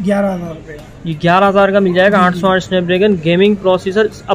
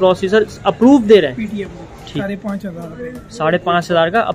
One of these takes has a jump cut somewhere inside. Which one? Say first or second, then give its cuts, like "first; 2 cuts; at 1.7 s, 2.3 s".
second; 1 cut; at 2.2 s